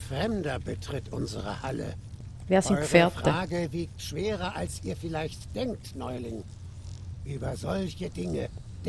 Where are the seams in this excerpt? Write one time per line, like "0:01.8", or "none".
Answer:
none